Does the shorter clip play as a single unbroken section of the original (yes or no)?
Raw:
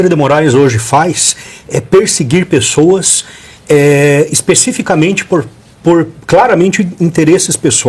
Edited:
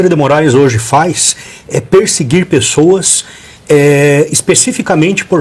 yes